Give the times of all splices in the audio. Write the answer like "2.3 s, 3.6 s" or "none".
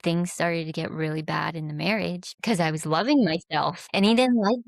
2.5 s, 3.8 s